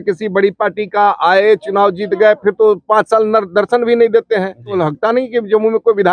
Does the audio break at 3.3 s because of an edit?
no; 1 cut; at 4.8 s

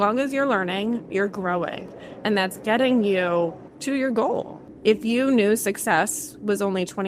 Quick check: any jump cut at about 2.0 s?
no; 2 cuts; at 3.7 s, 4.6 s

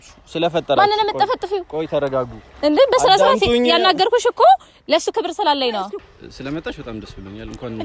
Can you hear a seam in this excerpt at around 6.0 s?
yes; 1 cut; at 6.0 s

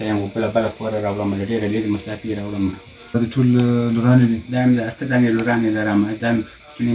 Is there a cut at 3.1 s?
yes; 1 cut; at 3.1 s

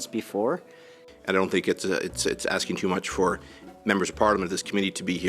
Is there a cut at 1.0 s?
yes; 1 cut; at 1.0 s

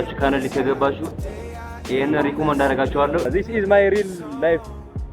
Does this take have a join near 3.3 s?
yes; 1 cut; at 3.3 s

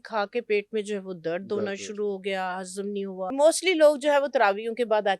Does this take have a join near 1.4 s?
no; 1 cut; at 3.3 s

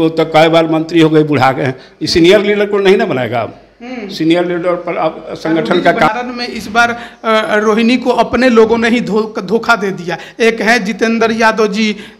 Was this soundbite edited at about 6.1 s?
yes; 1 cut; at 6.1 s

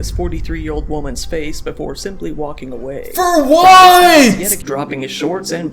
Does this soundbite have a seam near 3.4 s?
no; 1 cut; at 4.6 s

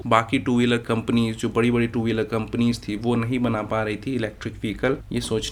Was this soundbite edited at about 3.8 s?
no; 0 cuts

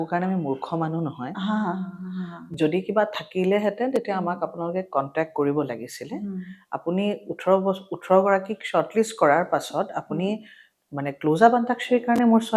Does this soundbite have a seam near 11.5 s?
no; 0 cuts

